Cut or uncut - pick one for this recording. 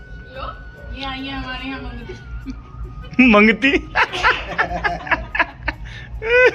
uncut